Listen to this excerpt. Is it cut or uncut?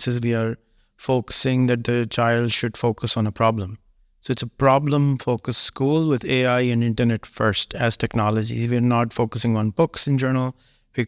uncut